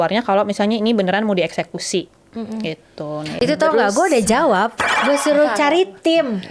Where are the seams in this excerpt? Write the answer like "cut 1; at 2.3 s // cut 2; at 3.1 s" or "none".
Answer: cut 1; at 3.3 s // cut 2; at 4.9 s